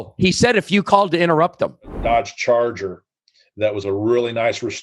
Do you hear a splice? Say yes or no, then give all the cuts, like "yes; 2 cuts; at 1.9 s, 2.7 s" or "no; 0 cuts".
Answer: yes; 1 cut; at 1.9 s